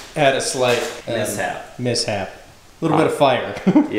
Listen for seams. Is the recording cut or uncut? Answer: cut